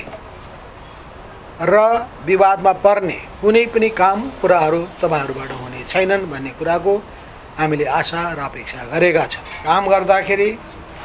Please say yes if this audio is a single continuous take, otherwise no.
no